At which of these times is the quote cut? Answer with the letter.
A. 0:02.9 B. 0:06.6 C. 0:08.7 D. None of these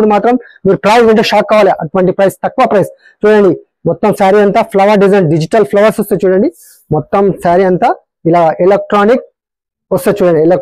D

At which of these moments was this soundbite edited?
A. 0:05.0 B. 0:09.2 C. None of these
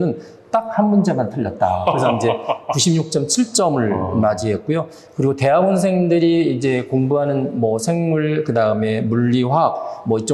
C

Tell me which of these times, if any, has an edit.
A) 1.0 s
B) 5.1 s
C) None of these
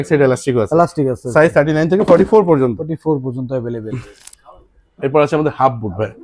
C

